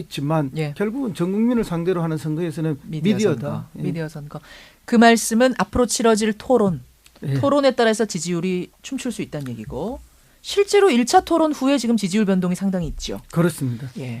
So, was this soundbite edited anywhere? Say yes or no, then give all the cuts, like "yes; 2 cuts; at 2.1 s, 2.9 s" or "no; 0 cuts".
yes; 1 cut; at 4.8 s